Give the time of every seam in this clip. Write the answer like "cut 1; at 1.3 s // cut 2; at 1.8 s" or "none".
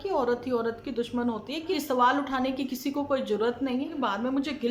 cut 1; at 1.8 s // cut 2; at 3.9 s